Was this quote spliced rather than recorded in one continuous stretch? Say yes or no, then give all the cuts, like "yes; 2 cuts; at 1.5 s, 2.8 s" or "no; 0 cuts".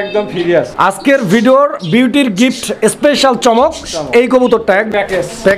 yes; 2 cuts; at 0.9 s, 4.7 s